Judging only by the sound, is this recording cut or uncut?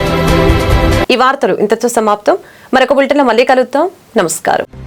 uncut